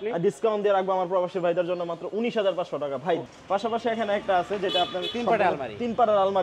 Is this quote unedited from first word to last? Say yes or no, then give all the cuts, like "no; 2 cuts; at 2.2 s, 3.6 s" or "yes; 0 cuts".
no; 1 cut; at 3.3 s